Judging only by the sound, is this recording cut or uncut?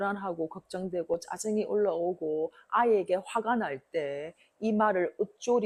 uncut